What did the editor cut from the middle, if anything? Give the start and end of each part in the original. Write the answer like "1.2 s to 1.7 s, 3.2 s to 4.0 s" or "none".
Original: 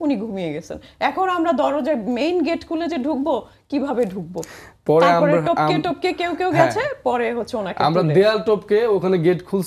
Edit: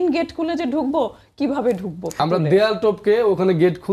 4.5 s to 7.8 s

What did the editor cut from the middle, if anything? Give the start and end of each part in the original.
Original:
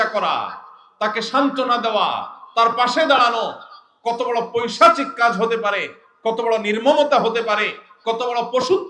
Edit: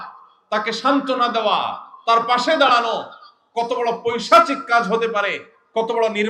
none

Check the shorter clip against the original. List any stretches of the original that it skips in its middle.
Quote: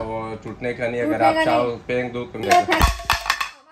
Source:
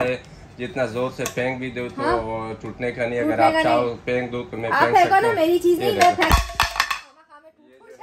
4.6 s to 5.9 s

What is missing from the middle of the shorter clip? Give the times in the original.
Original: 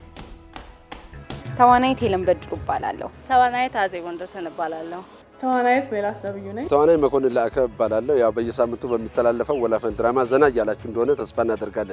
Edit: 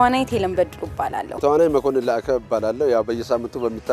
3.0 s to 6.6 s

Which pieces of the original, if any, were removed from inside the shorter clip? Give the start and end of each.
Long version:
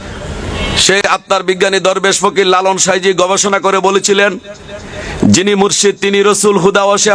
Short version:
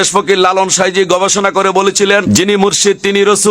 4.4 s to 5.3 s

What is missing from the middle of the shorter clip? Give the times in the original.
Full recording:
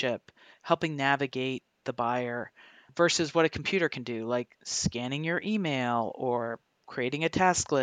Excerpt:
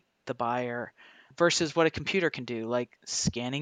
none

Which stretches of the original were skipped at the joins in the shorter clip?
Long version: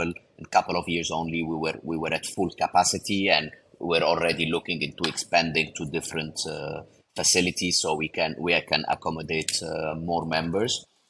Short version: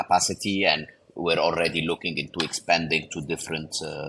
none

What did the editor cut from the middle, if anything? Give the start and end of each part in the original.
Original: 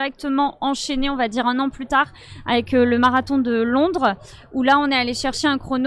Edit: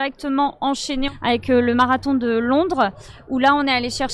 1.1 s to 2.3 s

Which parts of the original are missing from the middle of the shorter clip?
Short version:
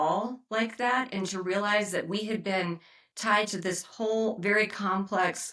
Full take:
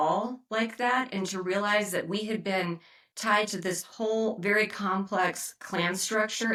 none

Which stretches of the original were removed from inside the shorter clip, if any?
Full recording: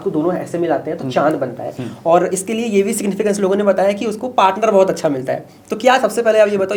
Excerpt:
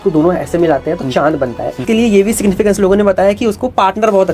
1.8 s to 2.4 s

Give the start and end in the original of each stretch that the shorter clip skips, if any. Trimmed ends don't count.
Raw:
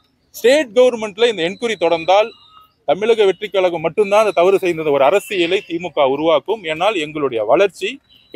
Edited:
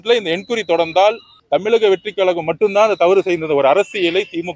2.4 s to 2.7 s

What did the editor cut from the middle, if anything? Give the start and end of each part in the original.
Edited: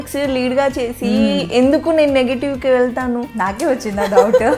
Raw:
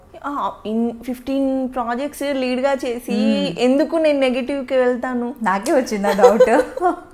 none

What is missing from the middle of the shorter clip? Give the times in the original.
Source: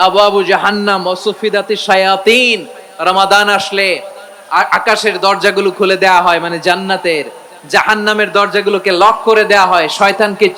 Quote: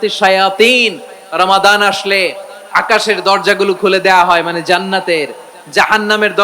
4.4 s to 4.7 s

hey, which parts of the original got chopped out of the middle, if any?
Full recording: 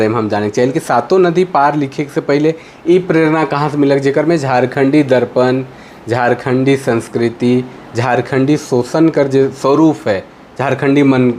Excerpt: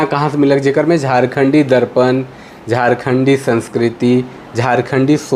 none

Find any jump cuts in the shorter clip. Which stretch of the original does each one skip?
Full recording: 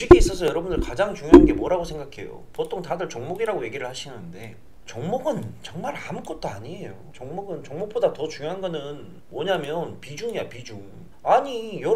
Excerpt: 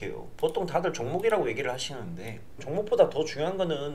4.8 s to 7.7 s

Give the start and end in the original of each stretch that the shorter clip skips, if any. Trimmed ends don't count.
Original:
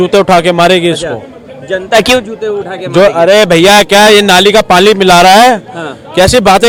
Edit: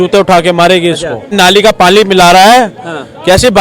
1.3 s to 4.2 s

